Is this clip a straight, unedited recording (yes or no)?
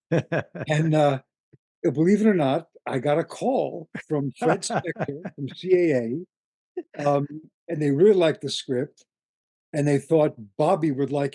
yes